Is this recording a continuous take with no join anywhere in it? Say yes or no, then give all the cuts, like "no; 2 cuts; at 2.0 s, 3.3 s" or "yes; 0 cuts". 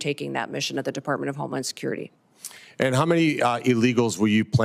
no; 1 cut; at 2.1 s